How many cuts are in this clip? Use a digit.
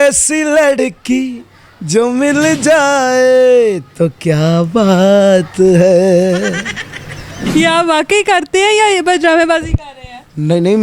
1